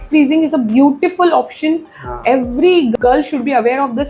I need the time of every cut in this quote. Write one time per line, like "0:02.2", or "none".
0:02.9